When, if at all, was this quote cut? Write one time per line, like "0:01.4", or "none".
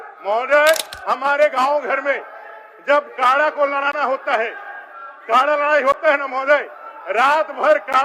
0:00.9